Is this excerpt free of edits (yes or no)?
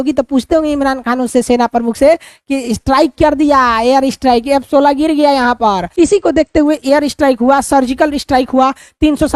no